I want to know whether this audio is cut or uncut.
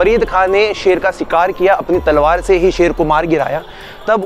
uncut